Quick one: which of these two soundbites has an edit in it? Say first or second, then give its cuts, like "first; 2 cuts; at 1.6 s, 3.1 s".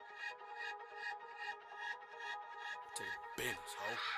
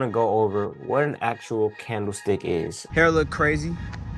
second; 1 cut; at 2.8 s